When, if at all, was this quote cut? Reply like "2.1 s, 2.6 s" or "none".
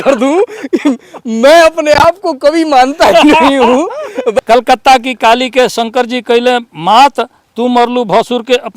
4.4 s